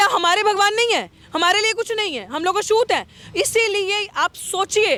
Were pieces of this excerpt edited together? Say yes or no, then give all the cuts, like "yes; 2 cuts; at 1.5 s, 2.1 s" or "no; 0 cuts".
no; 0 cuts